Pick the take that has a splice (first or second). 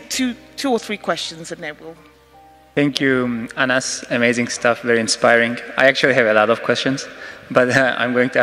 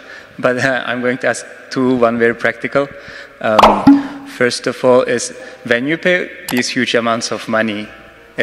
second